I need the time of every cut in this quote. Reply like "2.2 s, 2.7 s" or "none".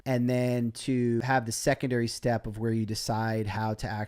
1.2 s